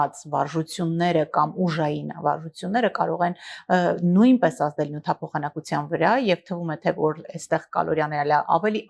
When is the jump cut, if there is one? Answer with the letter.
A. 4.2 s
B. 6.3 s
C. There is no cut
C